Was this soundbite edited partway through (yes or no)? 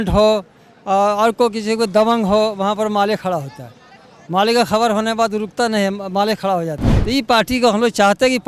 yes